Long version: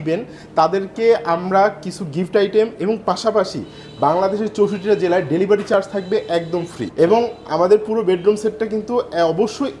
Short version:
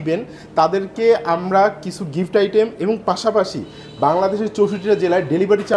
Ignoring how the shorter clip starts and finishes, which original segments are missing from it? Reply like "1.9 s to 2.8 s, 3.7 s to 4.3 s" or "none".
none